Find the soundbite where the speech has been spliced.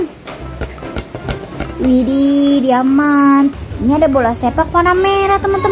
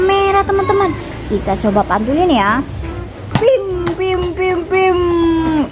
first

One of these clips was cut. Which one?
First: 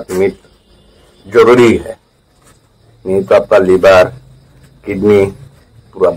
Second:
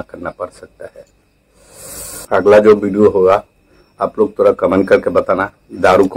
second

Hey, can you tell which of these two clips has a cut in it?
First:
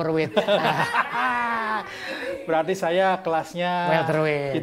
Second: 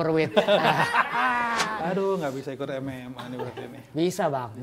second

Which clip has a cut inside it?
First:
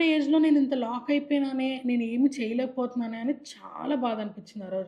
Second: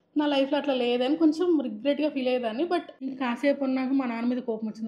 second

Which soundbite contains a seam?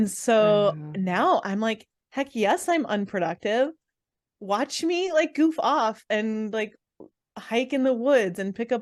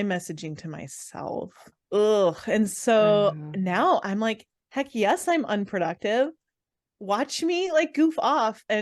second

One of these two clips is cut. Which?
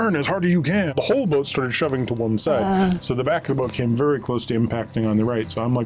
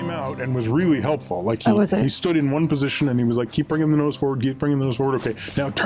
first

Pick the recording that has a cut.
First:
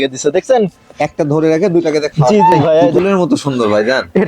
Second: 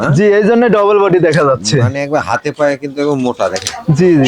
first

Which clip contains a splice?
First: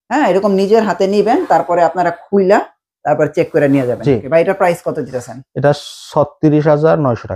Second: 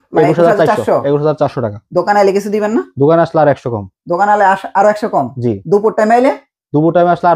first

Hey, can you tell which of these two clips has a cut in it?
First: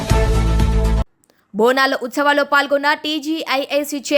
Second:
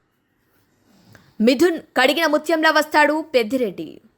first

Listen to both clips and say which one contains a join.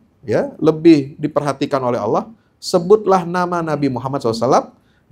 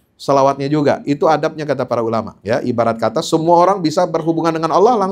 second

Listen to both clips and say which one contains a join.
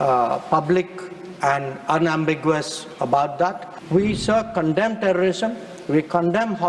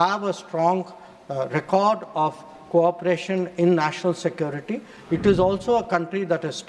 first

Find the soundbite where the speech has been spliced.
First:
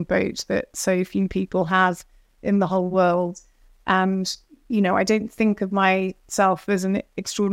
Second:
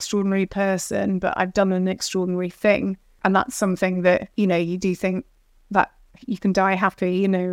second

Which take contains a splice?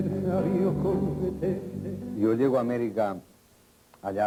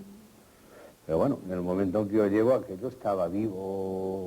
second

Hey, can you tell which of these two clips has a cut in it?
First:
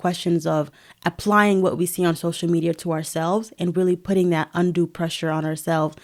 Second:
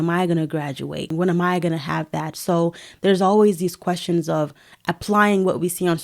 second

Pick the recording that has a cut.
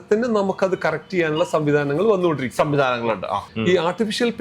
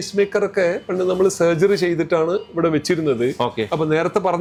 first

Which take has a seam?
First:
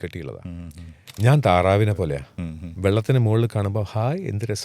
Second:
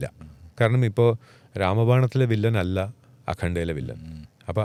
first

